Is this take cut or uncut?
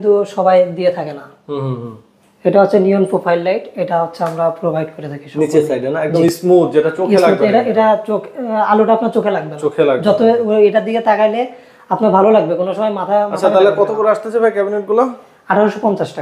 uncut